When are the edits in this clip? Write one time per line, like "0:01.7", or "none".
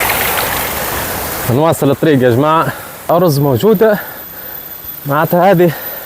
0:03.1